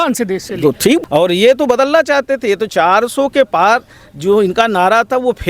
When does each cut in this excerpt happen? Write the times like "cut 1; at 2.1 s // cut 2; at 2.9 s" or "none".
cut 1; at 1.0 s